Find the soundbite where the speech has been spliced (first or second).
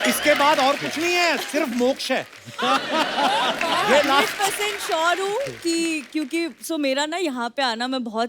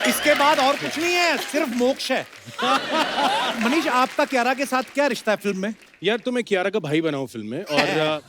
second